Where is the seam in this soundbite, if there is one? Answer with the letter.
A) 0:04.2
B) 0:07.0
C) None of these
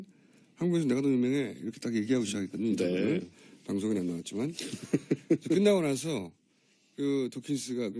A